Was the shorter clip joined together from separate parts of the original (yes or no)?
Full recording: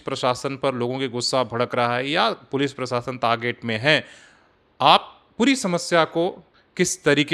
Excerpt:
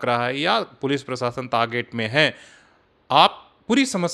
no